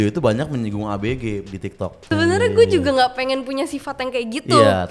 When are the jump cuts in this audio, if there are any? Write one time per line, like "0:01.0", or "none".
0:02.1